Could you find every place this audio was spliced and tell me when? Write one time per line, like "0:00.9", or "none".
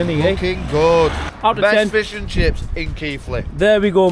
0:01.2

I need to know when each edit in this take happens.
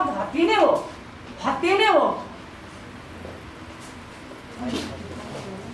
0:04.5

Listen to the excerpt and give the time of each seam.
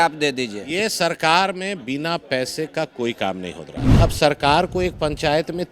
0:03.8

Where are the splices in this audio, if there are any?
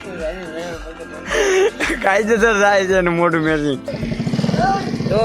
0:03.9

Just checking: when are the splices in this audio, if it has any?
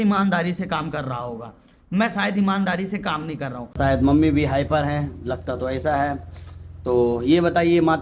0:03.7
0:05.5

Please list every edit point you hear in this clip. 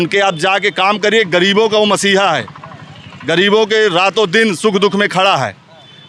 none

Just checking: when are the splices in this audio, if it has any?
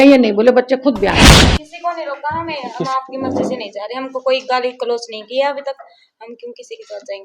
0:01.2

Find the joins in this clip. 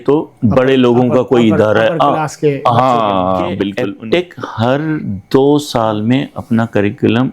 0:03.7

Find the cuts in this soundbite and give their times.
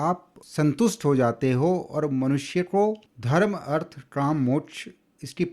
0:03.1

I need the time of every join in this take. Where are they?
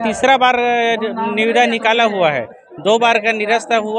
none

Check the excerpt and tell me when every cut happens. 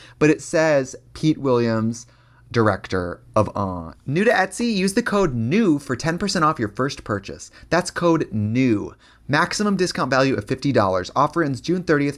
0:03.8

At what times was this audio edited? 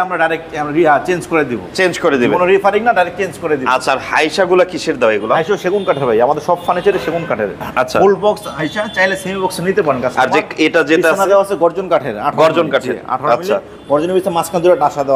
none

